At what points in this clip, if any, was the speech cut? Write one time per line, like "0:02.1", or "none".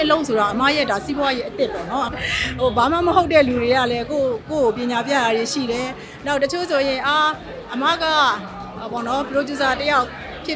0:02.1